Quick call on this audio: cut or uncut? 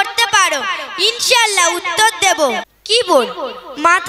cut